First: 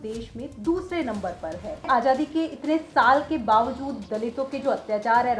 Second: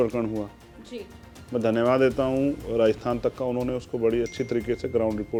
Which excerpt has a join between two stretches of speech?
first; 1 cut; at 1.9 s

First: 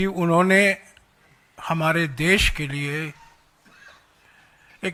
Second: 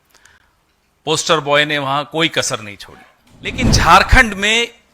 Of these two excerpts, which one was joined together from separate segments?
second; 1 cut; at 3.6 s

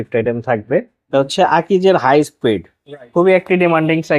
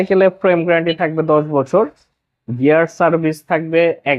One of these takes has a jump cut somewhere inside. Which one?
first; 1 cut; at 1.0 s

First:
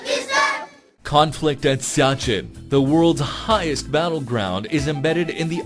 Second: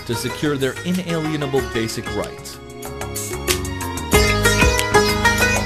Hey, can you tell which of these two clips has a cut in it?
first; 1 cut; at 1.8 s

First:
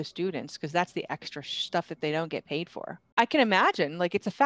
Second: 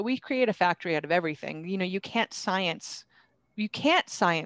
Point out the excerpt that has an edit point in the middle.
first; 1 cut; at 3.0 s

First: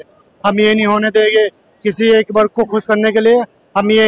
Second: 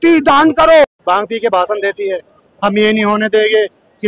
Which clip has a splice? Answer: second; 1 cut; at 1.0 s

